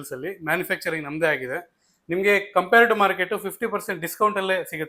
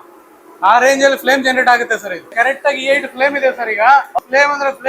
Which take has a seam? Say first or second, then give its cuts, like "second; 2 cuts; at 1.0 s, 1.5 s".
second; 2 cuts; at 2.3 s, 4.2 s